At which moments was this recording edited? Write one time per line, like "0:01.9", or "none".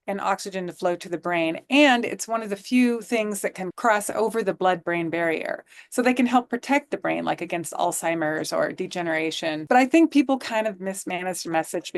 0:03.6
0:09.6